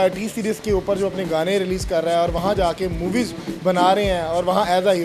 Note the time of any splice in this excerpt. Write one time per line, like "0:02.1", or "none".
none